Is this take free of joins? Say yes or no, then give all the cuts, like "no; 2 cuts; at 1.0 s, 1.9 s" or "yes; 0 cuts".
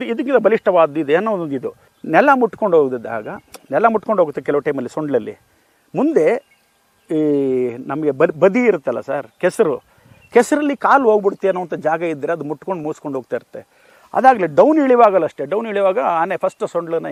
yes; 0 cuts